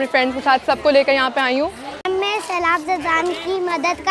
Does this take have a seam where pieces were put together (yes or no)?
yes